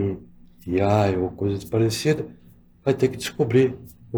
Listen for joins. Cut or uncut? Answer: uncut